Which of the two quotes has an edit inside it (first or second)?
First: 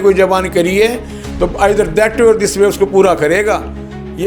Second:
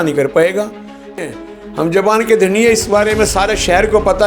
second